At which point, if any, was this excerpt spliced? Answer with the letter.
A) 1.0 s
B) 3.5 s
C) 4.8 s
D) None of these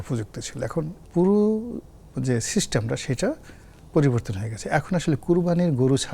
A